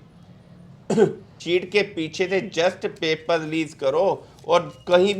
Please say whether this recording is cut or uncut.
cut